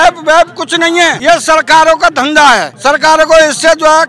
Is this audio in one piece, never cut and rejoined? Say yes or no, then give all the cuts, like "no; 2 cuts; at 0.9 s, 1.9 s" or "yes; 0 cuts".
no; 2 cuts; at 1.2 s, 2.7 s